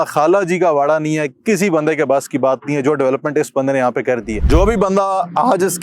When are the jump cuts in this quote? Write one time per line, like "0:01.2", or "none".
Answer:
0:04.4